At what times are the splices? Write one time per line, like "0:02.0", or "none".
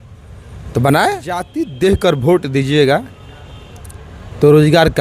0:01.6